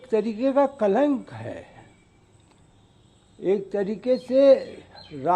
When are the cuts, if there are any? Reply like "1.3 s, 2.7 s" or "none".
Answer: none